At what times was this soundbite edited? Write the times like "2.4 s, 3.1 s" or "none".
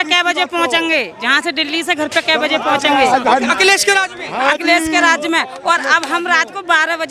none